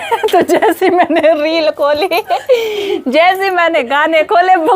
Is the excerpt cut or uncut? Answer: uncut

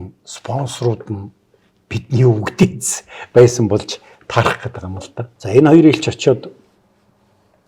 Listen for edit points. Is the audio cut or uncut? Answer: cut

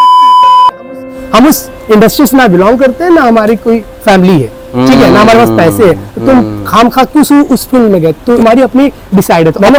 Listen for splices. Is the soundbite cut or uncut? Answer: uncut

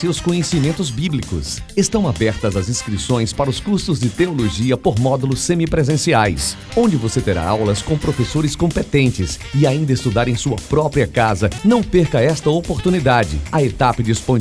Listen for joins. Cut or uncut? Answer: uncut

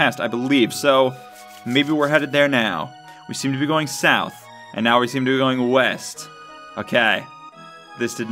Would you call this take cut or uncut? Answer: uncut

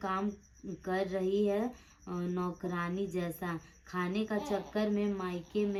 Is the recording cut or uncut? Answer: uncut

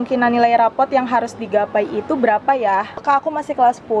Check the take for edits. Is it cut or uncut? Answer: cut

